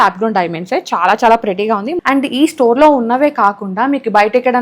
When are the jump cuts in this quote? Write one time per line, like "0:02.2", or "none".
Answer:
0:01.9